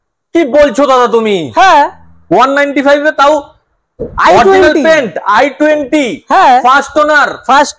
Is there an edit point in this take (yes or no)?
no